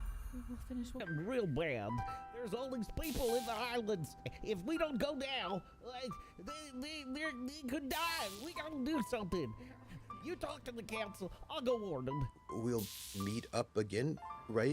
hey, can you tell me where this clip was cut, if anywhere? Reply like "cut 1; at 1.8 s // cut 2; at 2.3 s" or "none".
cut 1; at 1.0 s